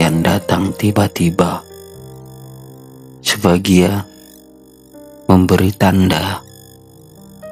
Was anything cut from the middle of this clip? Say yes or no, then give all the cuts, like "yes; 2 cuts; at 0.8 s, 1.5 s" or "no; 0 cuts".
no; 0 cuts